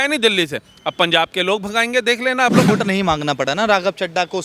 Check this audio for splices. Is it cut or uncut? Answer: cut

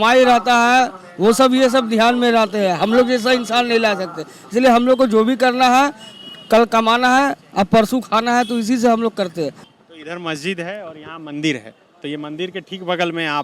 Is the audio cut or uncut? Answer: cut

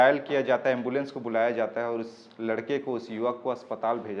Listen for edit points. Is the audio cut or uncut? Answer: uncut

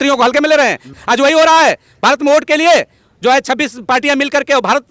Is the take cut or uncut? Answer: cut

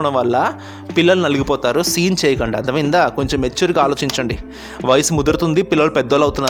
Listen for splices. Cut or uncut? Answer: uncut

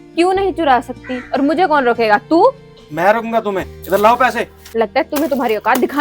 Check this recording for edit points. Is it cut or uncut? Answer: uncut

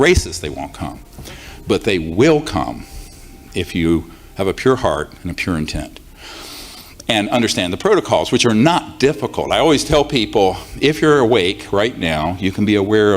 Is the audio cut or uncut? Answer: uncut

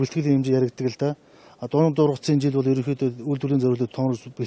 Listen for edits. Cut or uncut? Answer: uncut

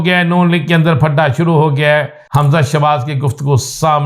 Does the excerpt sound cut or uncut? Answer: cut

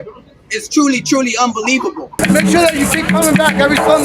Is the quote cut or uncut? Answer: cut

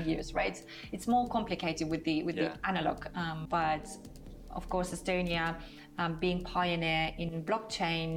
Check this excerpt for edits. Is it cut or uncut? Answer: cut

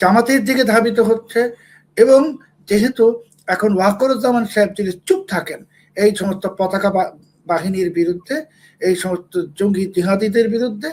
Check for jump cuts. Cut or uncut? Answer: uncut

